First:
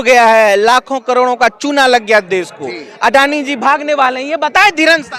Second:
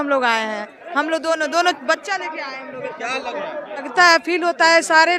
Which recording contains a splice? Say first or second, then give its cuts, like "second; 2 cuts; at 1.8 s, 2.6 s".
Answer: second; 1 cut; at 3.9 s